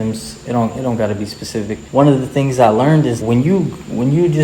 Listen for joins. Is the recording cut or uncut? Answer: cut